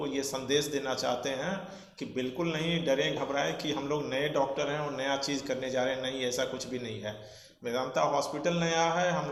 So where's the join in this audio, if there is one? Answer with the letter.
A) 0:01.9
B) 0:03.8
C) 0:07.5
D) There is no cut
D